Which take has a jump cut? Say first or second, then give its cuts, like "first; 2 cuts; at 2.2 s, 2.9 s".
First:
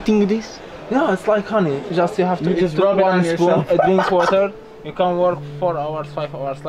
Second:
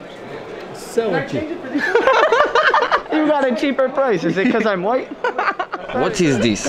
second; 2 cuts; at 3.0 s, 5.9 s